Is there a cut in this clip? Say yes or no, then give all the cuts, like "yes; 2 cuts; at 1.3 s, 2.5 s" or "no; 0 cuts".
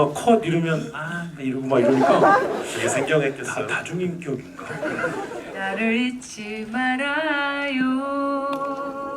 yes; 1 cut; at 5.5 s